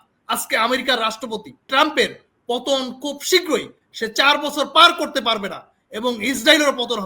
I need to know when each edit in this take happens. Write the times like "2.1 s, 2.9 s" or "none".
1.7 s

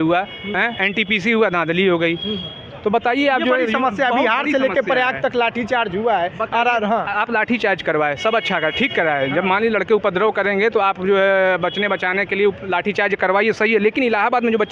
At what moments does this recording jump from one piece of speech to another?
none

